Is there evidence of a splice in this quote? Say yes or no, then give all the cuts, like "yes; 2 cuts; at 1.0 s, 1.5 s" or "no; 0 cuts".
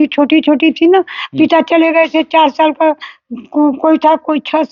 no; 0 cuts